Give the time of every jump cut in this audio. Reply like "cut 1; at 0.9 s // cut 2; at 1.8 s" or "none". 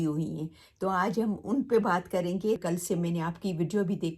cut 1; at 2.6 s